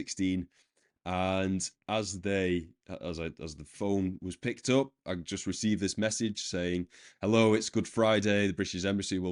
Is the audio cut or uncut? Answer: uncut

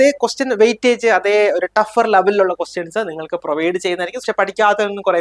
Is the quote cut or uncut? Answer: cut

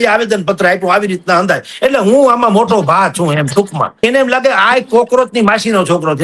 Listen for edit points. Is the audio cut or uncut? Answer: cut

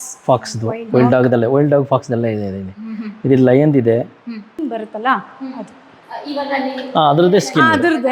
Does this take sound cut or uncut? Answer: cut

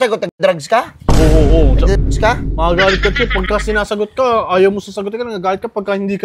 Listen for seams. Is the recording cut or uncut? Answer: uncut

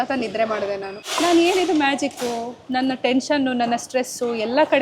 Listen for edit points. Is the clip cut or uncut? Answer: cut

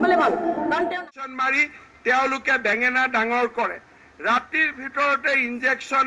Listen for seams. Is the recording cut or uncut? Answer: cut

